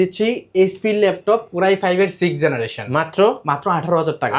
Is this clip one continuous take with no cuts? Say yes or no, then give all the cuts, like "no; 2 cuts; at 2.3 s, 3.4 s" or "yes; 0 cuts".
yes; 0 cuts